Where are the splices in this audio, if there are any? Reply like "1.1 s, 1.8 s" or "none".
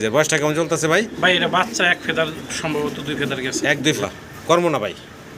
4.0 s